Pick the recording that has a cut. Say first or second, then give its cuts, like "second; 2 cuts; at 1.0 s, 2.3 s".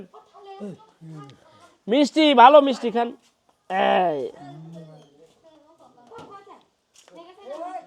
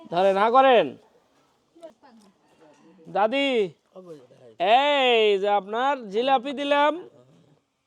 second; 1 cut; at 1.9 s